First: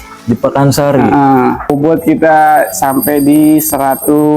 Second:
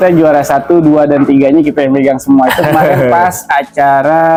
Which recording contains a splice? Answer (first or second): first